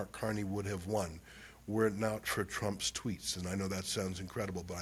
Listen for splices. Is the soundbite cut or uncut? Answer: uncut